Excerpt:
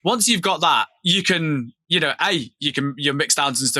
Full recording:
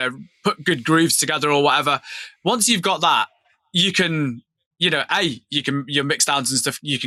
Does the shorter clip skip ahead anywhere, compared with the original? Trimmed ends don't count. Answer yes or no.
yes